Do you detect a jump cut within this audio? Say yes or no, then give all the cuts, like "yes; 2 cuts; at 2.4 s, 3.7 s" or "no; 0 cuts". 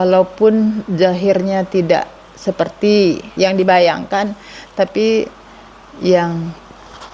yes; 1 cut; at 3.3 s